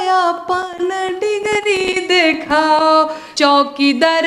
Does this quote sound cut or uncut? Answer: cut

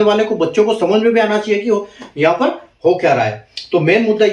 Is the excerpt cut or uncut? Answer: uncut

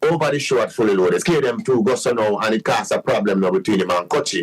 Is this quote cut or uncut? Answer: cut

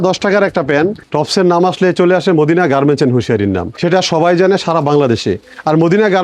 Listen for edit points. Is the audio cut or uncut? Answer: cut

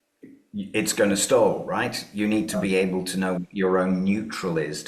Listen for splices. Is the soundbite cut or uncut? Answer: uncut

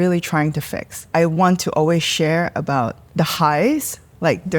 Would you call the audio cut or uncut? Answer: cut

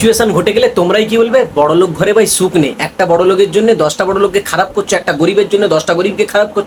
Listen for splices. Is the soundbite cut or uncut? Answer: uncut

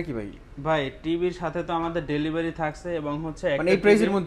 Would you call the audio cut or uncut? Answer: uncut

